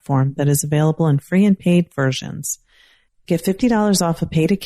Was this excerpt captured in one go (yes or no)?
yes